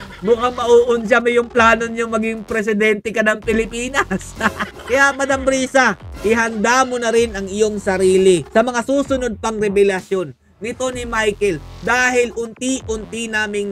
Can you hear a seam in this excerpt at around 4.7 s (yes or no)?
yes